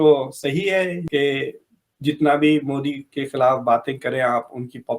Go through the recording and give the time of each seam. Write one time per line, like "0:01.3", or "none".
none